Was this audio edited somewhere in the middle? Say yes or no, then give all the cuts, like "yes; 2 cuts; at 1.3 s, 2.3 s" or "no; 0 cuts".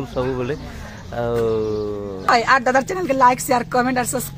yes; 1 cut; at 2.2 s